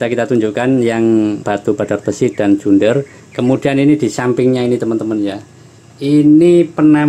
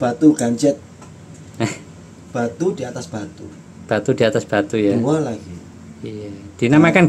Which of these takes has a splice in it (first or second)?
first